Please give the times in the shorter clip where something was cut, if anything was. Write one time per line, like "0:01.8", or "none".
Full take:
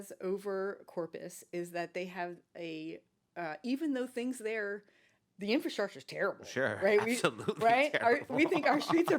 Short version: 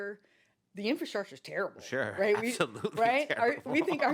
none